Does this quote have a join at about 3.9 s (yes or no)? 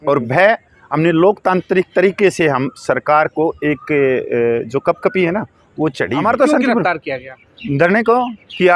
no